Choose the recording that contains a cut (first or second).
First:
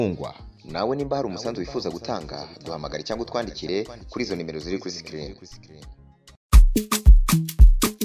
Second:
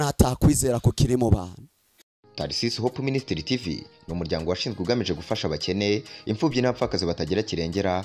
second